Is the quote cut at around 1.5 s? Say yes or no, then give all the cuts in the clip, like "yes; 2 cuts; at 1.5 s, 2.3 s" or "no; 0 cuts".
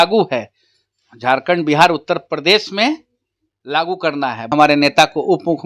no; 1 cut; at 4.5 s